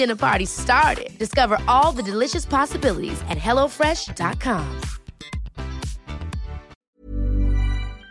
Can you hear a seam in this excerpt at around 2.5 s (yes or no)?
no